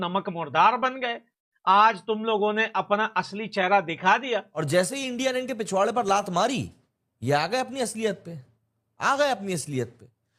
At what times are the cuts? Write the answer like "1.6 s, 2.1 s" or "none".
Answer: 4.5 s